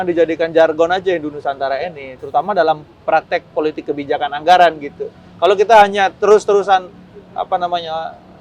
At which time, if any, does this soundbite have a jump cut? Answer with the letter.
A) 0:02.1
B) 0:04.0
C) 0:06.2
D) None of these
D